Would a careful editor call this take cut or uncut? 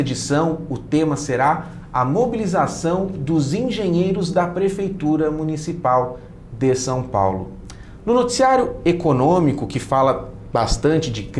uncut